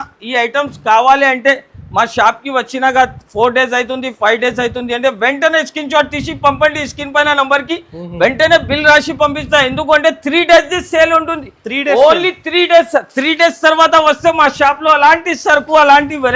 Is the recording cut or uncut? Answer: uncut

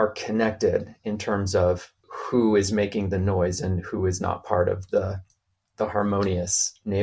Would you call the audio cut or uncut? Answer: uncut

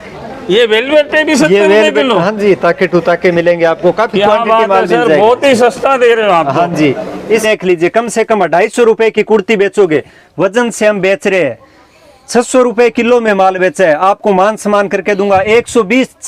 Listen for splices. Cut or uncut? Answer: cut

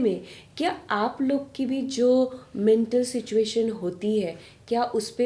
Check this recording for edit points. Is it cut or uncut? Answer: uncut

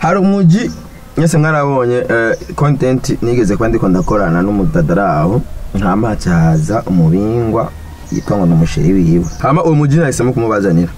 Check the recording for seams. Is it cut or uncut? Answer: cut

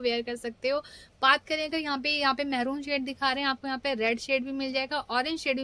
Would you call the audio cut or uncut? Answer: uncut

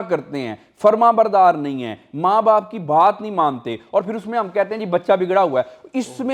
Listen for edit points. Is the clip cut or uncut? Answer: uncut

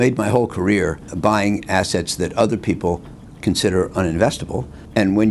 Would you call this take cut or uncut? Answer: uncut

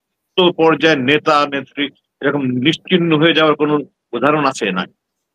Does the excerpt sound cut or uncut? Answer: uncut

